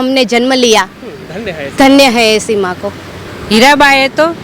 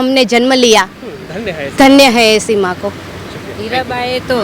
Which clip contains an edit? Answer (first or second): first